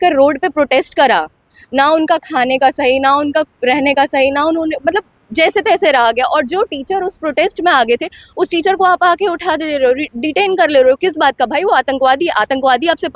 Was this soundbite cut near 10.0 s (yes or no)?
no